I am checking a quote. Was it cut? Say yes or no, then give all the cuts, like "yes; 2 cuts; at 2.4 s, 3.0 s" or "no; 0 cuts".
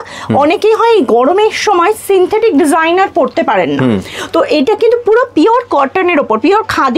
no; 0 cuts